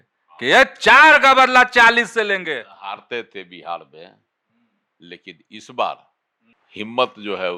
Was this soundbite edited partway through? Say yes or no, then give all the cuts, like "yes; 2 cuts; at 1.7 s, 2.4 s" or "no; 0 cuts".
no; 0 cuts